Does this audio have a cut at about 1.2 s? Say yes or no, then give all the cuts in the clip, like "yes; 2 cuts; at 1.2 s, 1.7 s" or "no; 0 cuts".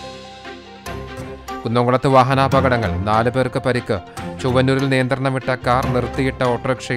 yes; 1 cut; at 1.2 s